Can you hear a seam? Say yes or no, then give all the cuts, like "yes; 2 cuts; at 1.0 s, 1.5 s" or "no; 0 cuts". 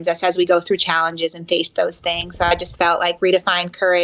no; 0 cuts